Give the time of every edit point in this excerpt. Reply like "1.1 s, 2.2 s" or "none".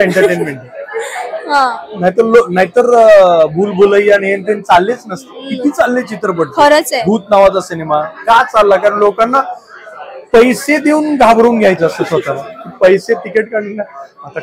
none